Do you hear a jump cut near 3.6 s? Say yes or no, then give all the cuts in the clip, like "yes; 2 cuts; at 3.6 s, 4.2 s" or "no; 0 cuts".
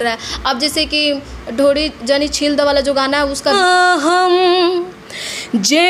yes; 1 cut; at 3.6 s